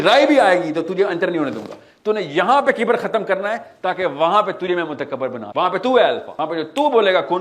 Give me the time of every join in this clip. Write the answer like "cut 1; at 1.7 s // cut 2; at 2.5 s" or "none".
cut 1; at 5.4 s // cut 2; at 6.3 s